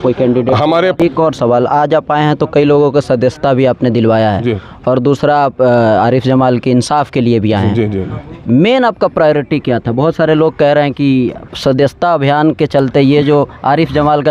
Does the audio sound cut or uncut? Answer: cut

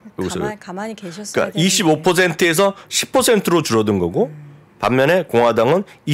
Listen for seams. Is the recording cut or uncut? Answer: uncut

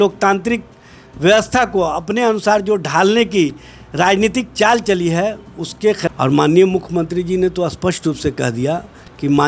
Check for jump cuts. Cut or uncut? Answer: cut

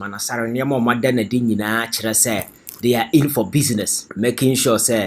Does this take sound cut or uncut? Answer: cut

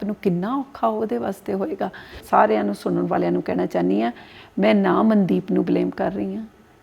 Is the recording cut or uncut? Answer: cut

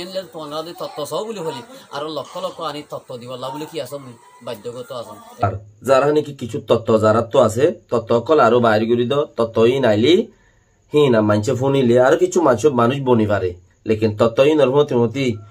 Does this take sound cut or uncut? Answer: cut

